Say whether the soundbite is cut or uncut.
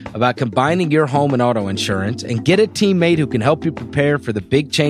uncut